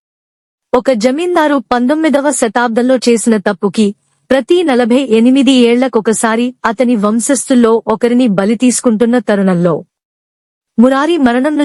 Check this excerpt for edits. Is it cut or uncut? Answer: uncut